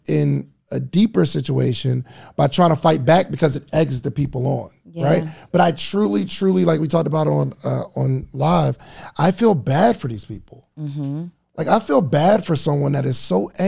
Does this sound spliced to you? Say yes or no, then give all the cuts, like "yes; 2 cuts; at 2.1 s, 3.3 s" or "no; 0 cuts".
no; 0 cuts